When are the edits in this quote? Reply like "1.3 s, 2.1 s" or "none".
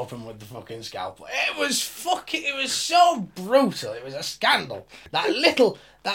5.1 s